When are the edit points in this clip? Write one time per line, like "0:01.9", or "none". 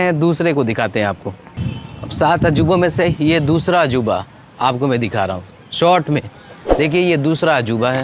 none